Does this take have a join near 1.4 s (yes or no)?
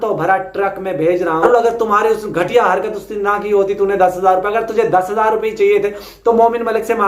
yes